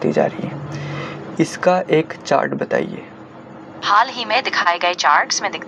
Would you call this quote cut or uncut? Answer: uncut